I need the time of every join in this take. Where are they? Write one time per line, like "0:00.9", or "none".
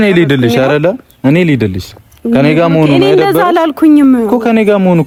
none